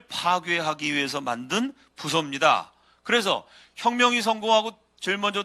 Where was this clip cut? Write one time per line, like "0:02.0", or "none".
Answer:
none